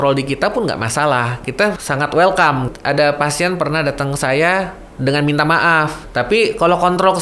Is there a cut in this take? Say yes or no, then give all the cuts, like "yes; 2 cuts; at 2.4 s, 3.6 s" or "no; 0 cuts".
yes; 3 cuts; at 1.5 s, 2.7 s, 6.0 s